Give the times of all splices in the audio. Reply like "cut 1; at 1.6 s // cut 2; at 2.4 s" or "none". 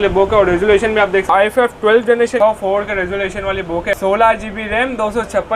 cut 1; at 1.3 s // cut 2; at 2.4 s // cut 3; at 4.0 s